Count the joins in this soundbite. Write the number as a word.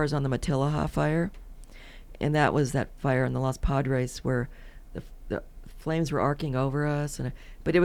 zero